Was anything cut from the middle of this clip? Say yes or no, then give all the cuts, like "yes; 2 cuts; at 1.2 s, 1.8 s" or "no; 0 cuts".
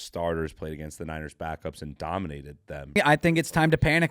yes; 1 cut; at 3.0 s